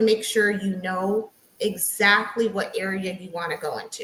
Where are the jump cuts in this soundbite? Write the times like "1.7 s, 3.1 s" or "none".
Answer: none